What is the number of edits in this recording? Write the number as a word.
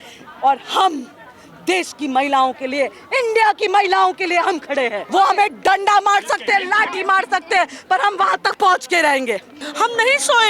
two